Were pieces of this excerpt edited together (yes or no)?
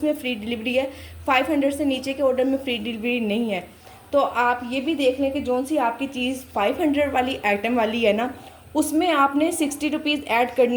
no